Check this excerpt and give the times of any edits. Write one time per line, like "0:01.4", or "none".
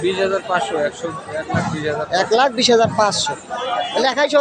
none